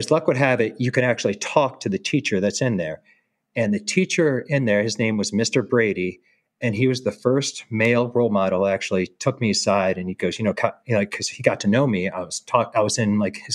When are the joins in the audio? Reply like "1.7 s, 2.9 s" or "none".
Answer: none